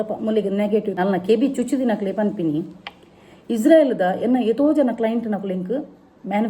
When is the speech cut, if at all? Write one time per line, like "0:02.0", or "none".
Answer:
0:01.0